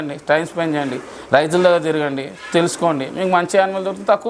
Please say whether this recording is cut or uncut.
uncut